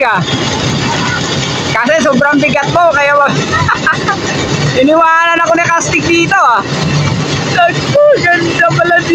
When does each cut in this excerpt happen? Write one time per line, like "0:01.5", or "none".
none